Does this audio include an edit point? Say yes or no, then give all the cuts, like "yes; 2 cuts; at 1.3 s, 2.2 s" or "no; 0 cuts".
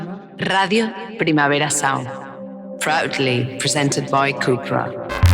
no; 0 cuts